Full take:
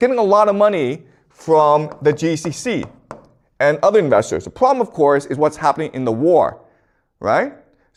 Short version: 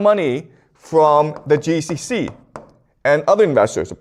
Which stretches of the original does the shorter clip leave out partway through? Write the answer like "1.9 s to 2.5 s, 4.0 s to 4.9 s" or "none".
none